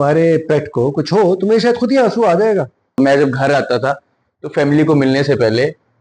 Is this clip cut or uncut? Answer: cut